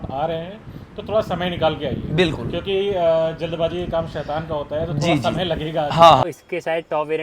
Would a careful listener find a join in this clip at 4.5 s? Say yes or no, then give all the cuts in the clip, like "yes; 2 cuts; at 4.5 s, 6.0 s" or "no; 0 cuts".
no; 1 cut; at 6.3 s